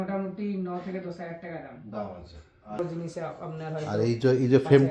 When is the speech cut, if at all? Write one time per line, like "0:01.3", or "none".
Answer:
0:02.8

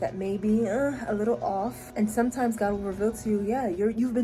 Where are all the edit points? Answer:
0:01.8

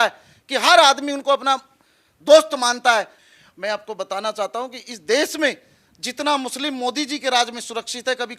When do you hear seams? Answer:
0:03.1

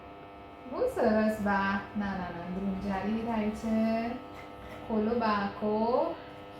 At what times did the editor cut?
none

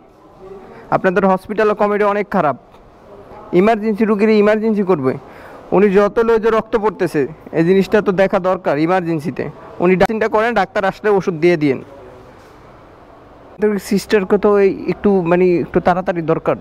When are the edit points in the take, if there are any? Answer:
none

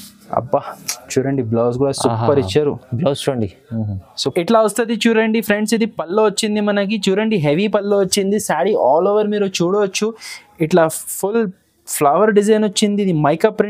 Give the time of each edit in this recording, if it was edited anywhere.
0:04.3

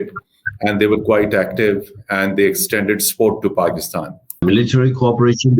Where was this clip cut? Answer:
0:04.4

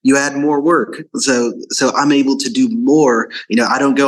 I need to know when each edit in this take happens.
none

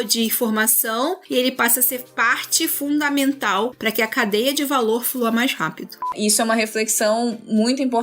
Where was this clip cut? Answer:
0:06.1

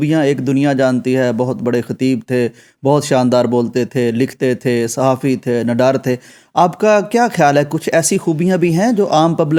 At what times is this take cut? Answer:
none

